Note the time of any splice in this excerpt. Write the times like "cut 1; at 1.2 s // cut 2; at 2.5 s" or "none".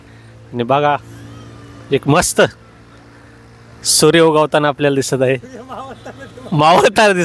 none

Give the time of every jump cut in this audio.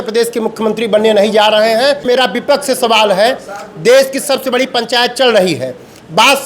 cut 1; at 2.0 s

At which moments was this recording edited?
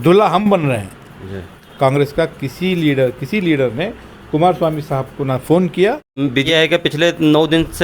cut 1; at 1.6 s // cut 2; at 6.5 s

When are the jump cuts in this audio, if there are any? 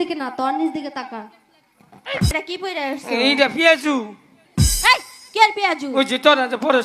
cut 1; at 2.3 s

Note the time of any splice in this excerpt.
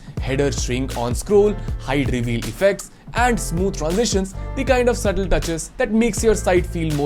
none

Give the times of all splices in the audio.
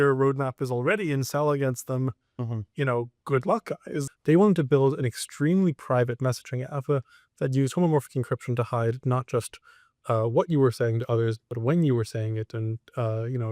cut 1; at 4.0 s

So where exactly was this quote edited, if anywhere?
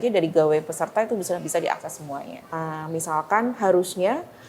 cut 1; at 2.5 s

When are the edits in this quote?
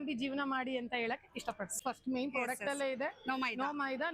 cut 1; at 1.8 s

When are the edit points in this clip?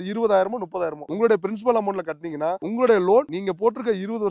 cut 1; at 1.0 s // cut 2; at 2.6 s // cut 3; at 3.3 s

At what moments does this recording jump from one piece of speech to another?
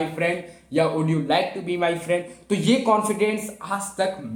none

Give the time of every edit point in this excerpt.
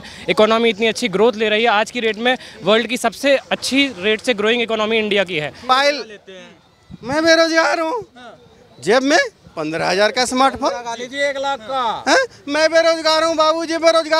cut 1; at 5.7 s

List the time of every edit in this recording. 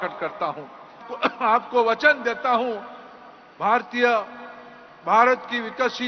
cut 1; at 1.1 s

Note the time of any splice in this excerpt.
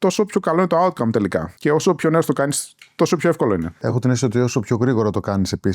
cut 1; at 1.5 s // cut 2; at 3.8 s

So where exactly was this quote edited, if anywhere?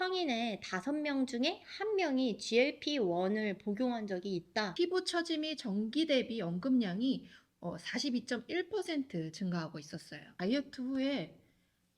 cut 1; at 4.7 s // cut 2; at 10.3 s

